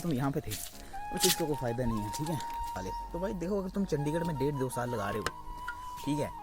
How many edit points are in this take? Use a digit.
1